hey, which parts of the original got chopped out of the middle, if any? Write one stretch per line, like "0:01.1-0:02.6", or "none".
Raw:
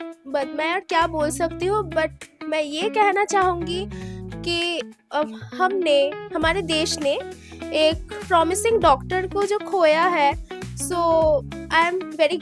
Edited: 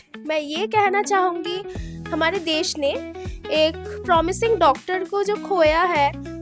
0:04.2-0:06.2